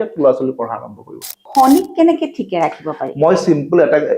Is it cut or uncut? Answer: cut